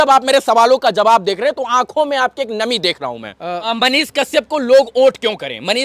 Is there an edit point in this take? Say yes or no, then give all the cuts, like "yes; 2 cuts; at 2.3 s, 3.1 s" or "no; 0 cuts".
yes; 1 cut; at 3.6 s